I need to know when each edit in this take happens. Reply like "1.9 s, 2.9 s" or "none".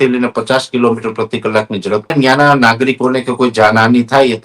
2.1 s